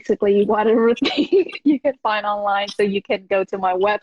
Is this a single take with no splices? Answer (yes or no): yes